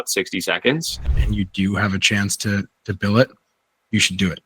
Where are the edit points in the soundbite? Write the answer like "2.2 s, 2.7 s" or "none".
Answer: 1.1 s